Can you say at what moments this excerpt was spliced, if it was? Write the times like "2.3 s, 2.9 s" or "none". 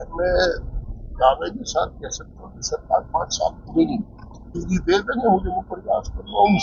4.5 s